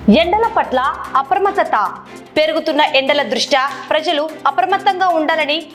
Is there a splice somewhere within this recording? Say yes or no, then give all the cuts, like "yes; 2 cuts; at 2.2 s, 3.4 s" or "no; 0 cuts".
no; 0 cuts